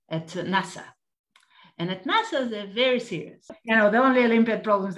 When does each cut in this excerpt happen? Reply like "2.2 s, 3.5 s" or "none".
3.6 s